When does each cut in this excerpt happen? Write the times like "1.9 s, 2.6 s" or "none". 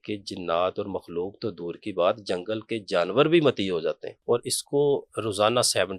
4.1 s